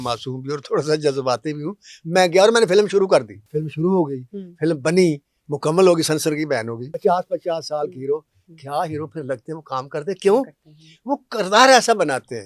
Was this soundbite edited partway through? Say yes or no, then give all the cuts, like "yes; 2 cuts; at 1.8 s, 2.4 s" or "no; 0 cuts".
yes; 2 cuts; at 3.4 s, 6.9 s